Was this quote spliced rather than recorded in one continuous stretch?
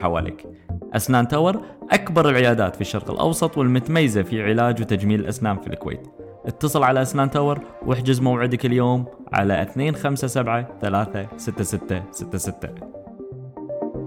yes; 1 cut; at 12.7 s

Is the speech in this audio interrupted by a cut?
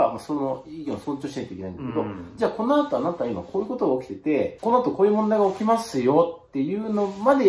yes; 1 cut; at 4.5 s

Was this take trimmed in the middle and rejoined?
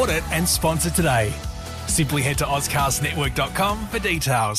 no; 0 cuts

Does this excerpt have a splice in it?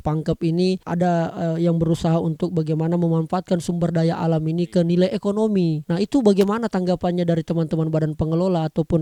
no; 0 cuts

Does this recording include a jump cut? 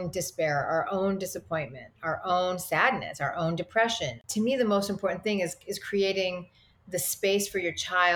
yes; 1 cut; at 4.2 s

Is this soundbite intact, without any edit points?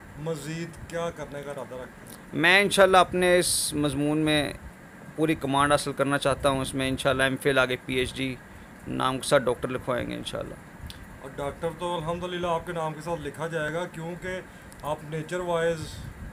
yes; 0 cuts

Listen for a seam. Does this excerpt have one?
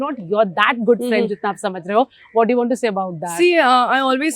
no; 0 cuts

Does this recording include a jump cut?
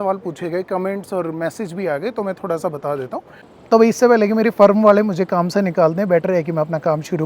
yes; 1 cut; at 3.4 s

